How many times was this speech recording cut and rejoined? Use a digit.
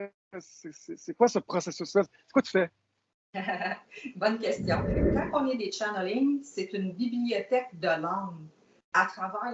1